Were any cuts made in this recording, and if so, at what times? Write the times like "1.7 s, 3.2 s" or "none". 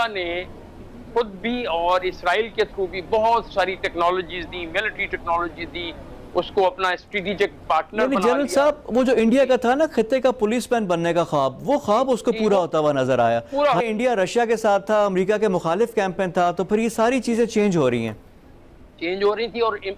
13.8 s